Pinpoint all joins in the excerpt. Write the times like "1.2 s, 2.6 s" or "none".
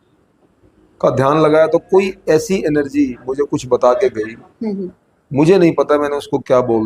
none